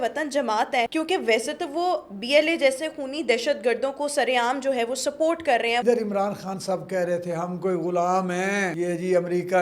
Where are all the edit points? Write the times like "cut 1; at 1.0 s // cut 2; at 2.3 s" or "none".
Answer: cut 1; at 0.9 s // cut 2; at 5.8 s // cut 3; at 8.7 s